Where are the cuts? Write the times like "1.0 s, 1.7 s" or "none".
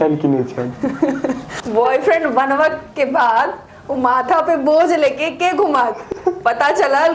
1.4 s, 6.1 s